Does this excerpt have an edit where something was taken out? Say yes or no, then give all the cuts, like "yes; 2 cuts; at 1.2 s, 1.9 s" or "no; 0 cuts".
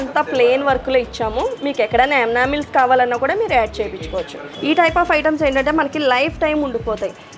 yes; 1 cut; at 4.4 s